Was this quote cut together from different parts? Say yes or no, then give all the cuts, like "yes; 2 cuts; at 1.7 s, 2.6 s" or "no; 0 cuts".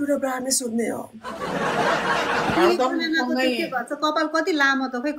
yes; 1 cut; at 2.6 s